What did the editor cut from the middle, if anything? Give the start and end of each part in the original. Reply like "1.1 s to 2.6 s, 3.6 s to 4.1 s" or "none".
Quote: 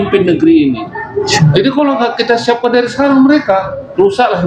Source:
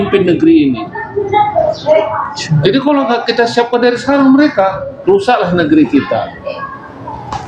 1.3 s to 2.4 s